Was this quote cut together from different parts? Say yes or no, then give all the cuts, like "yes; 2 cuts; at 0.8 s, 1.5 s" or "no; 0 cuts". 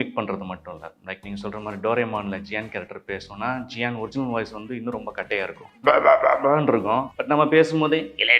yes; 2 cuts; at 5.6 s, 7.1 s